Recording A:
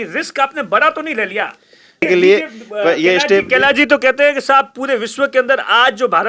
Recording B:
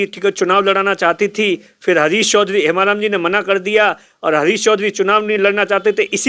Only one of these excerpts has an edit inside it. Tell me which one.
A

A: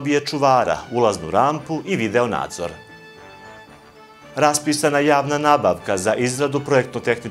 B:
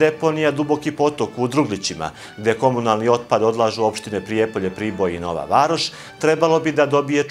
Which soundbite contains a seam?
A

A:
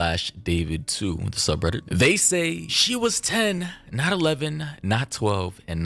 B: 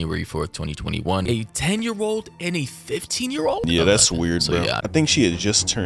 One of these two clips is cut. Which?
B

